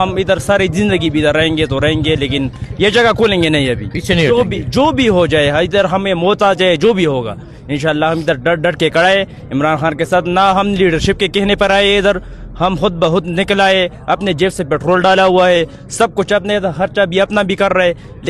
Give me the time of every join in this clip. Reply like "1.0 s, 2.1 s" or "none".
none